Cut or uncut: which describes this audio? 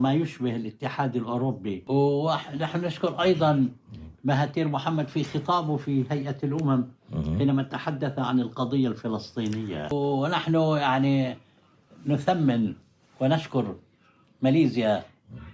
cut